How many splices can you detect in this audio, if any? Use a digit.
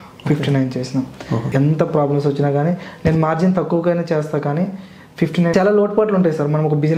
2